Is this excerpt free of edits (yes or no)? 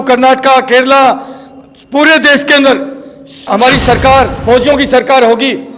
no